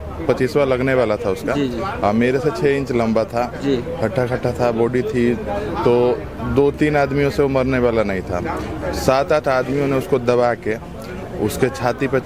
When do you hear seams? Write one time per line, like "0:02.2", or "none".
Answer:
none